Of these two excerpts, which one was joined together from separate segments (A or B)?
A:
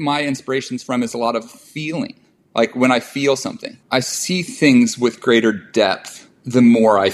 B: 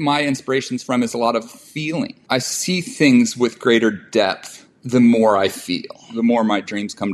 B